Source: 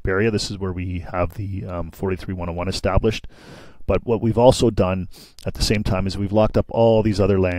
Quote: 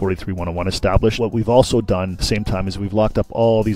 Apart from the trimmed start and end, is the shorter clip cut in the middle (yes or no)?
yes